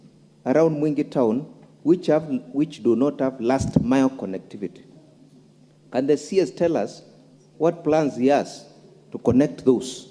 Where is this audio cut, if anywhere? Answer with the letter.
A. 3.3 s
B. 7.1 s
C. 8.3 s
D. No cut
D